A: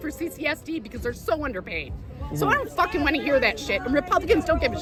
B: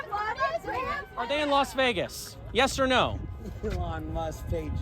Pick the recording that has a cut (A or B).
B